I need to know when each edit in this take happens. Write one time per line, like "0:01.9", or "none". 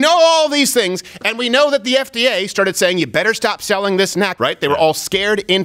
0:04.3